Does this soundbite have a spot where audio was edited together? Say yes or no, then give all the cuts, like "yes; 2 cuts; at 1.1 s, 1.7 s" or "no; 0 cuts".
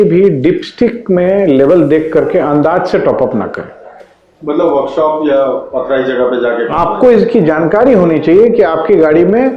no; 0 cuts